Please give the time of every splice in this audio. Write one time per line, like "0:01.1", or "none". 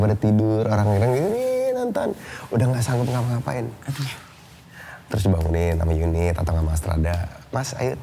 none